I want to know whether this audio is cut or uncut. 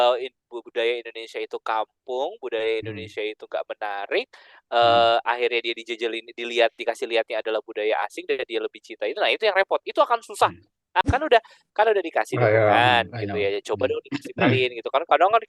cut